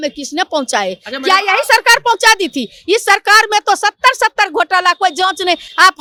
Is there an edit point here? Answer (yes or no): no